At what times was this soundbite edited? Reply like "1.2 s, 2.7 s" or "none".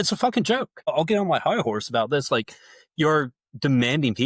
0.9 s